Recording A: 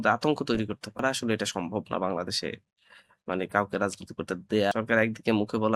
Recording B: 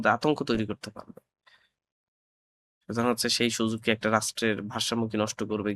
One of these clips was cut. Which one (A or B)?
A